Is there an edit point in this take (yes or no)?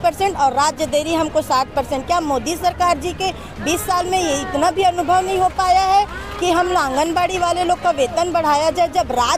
no